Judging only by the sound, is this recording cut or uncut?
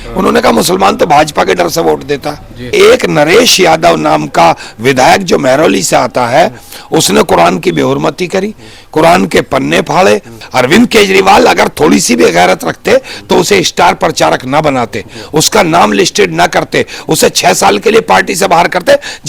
cut